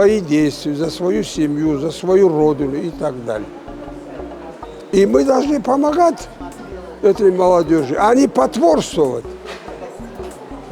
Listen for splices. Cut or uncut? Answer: uncut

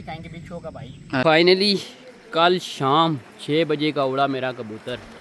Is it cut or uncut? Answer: cut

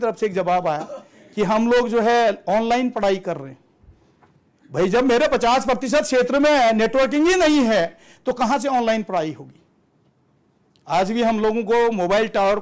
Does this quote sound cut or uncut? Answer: uncut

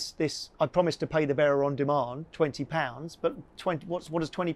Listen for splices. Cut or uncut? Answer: uncut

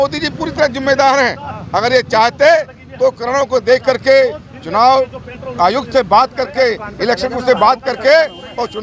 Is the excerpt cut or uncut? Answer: uncut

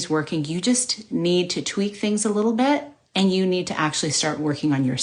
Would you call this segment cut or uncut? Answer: uncut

